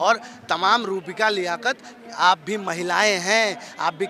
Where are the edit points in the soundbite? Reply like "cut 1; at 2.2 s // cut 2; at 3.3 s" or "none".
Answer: none